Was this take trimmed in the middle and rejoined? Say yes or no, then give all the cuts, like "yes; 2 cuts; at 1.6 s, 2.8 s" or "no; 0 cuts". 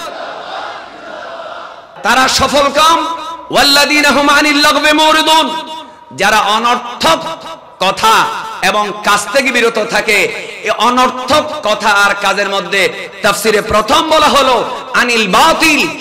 yes; 1 cut; at 1.9 s